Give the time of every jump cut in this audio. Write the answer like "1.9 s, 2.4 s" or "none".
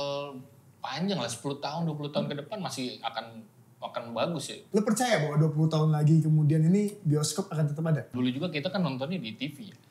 4.6 s, 8.1 s